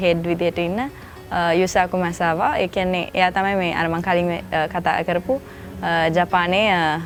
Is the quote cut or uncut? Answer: uncut